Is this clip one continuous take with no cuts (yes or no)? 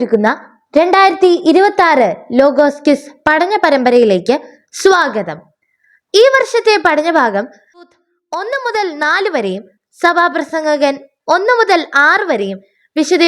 no